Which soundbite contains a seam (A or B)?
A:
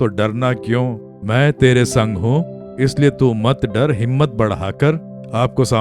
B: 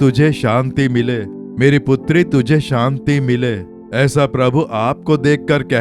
A